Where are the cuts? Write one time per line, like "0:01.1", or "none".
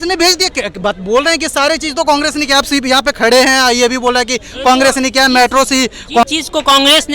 0:06.2